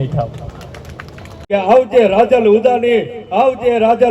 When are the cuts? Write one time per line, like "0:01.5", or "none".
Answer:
0:01.4